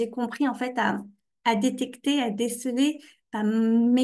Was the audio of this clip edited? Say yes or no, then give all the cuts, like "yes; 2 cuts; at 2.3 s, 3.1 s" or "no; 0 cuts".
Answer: no; 0 cuts